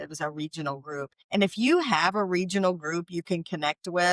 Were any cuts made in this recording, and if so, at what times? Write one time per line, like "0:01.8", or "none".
0:01.2

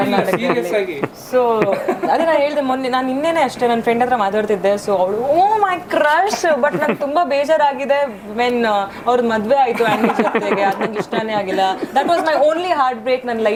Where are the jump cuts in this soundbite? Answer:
none

